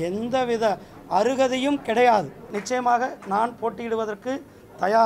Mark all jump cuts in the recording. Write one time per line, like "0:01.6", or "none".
0:02.5